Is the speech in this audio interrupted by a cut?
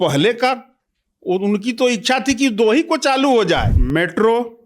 yes; 1 cut; at 3.7 s

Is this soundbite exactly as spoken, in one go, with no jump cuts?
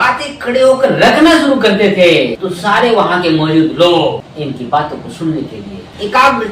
yes; 0 cuts

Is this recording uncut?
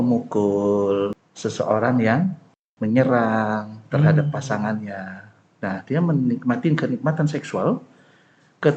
no; 1 cut; at 1.3 s

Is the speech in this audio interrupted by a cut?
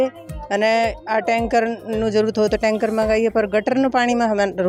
no; 0 cuts

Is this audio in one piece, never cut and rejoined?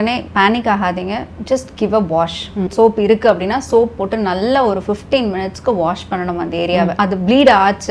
no; 2 cuts; at 2.7 s, 6.9 s

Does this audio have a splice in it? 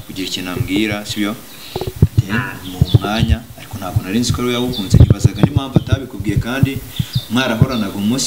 no; 0 cuts

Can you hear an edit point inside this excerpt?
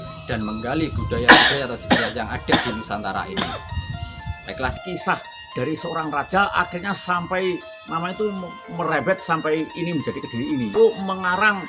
yes; 2 cuts; at 4.8 s, 10.7 s

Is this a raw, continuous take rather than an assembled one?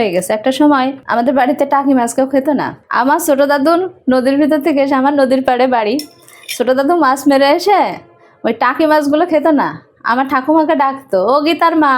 no; 2 cuts; at 1.0 s, 2.8 s

